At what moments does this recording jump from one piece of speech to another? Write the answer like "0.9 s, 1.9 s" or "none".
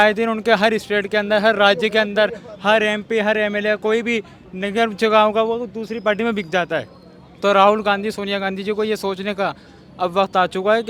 none